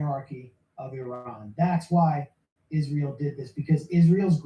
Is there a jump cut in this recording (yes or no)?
no